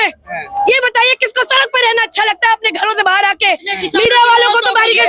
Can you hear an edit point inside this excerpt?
no; 0 cuts

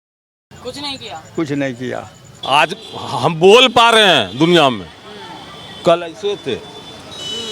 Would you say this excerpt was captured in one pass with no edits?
no; 1 cut; at 2.2 s

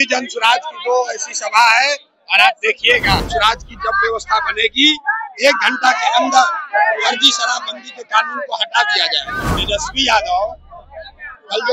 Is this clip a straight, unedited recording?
no; 2 cuts; at 3.2 s, 9.5 s

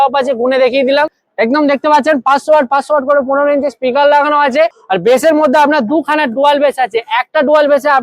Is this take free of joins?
no; 2 cuts; at 1.2 s, 4.8 s

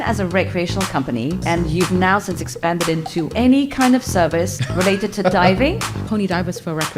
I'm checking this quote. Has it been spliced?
yes; 4 cuts; at 1.4 s, 3.3 s, 4.6 s, 5.9 s

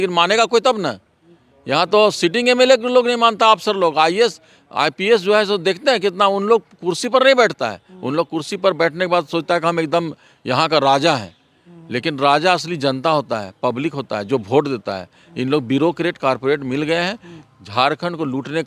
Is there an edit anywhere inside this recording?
no; 0 cuts

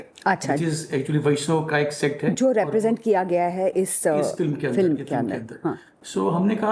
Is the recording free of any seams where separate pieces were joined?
yes; 0 cuts

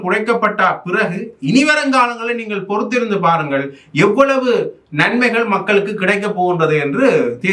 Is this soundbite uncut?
yes; 0 cuts

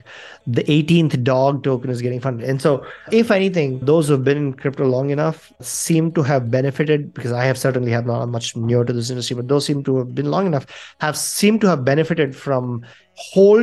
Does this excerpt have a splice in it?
no; 0 cuts

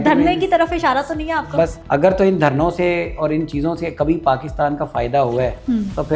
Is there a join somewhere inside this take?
yes; 1 cut; at 1.8 s

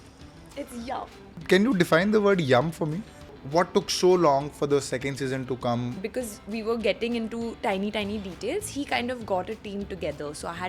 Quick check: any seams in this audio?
yes; 3 cuts; at 1.4 s, 3.4 s, 6.0 s

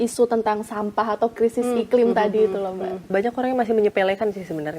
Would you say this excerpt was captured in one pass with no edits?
no; 1 cut; at 3.1 s

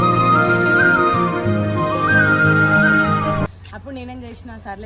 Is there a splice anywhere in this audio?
no; 0 cuts

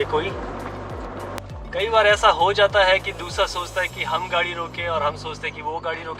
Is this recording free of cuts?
no; 1 cut; at 1.4 s

